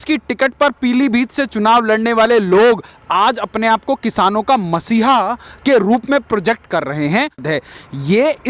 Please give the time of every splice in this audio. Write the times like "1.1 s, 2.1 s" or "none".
7.4 s